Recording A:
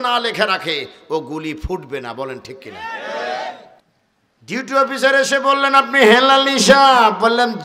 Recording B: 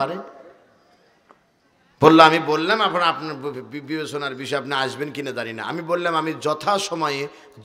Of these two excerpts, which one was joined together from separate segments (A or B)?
A